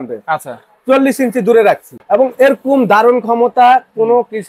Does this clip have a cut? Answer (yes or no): yes